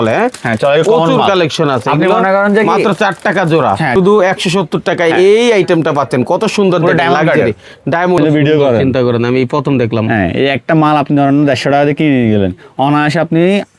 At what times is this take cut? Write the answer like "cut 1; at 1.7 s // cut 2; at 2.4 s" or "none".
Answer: cut 1; at 3.9 s // cut 2; at 8.2 s